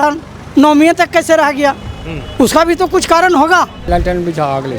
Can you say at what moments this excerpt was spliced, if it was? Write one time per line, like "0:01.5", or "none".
0:03.9